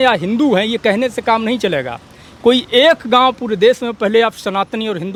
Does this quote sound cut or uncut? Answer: uncut